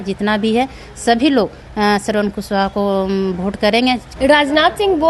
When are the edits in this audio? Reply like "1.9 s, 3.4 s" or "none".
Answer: 4.1 s